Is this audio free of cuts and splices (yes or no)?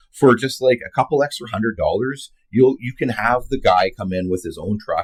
yes